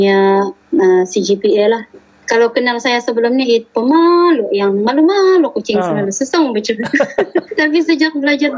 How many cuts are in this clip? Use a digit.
2